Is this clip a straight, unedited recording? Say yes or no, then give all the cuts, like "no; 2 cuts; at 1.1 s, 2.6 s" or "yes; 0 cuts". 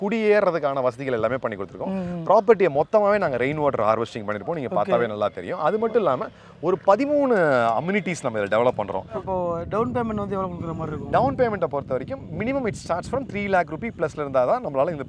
no; 1 cut; at 9.2 s